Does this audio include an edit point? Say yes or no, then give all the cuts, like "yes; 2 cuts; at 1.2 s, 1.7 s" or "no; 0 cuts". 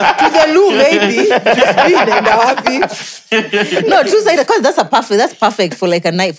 no; 0 cuts